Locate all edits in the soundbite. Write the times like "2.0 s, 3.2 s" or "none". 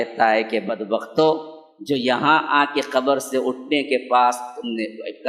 none